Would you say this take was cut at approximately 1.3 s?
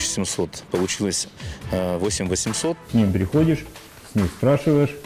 no; 1 cut; at 2.8 s

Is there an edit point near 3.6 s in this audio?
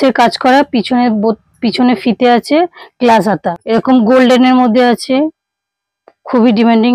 yes; 1 cut; at 3.6 s

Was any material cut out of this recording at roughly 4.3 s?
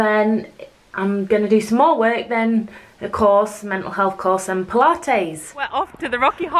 no; 1 cut; at 5.6 s

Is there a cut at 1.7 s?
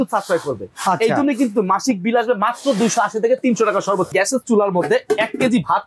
no; 1 cut; at 4.1 s

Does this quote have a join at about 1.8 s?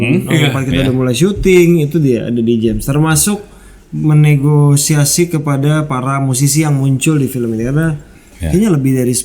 no; 0 cuts

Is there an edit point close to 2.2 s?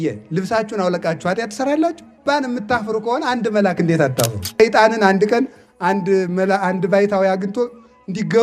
yes; 2 cuts; at 2.2 s, 4.6 s

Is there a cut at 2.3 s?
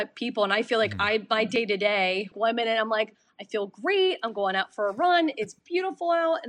yes; 1 cut; at 2.3 s

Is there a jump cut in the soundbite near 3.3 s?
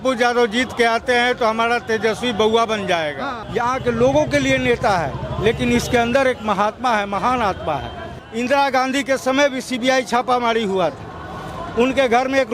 yes; 2 cuts; at 3.3 s, 8.2 s

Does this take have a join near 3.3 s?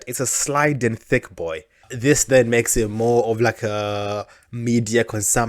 no; 1 cut; at 1.9 s

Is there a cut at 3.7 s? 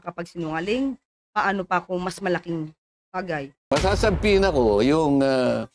yes; 1 cut; at 3.7 s

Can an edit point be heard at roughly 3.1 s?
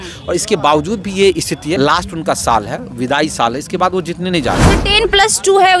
no; 2 cuts; at 1.8 s, 4.7 s

